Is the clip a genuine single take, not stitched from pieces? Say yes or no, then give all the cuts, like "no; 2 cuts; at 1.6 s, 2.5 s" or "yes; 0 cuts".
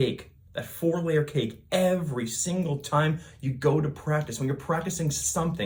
yes; 0 cuts